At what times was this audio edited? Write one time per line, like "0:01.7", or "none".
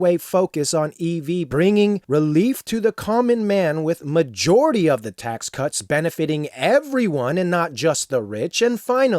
0:01.5